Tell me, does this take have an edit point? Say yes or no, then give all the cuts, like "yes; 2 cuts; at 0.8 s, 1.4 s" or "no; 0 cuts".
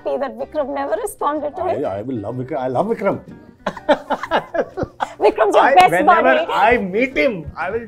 no; 0 cuts